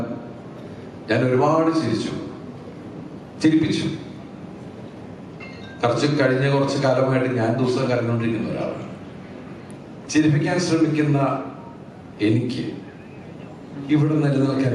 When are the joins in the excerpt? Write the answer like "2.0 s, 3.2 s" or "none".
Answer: none

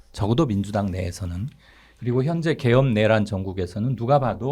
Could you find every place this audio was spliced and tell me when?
none

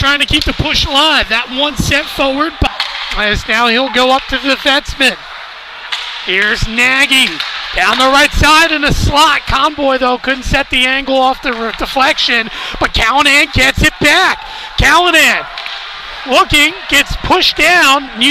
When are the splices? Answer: 2.7 s

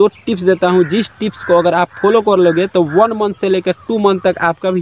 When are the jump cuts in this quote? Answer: none

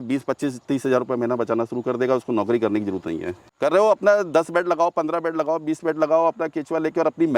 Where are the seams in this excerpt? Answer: 3.3 s

